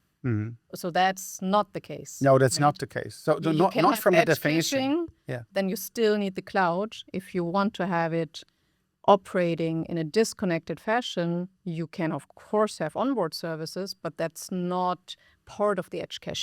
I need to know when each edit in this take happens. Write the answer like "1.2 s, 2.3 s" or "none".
none